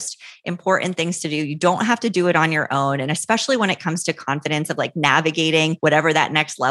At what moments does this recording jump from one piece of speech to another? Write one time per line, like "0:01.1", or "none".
0:05.8